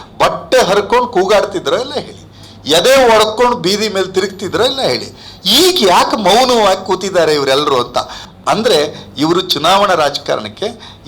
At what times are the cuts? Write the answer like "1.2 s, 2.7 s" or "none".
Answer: 8.2 s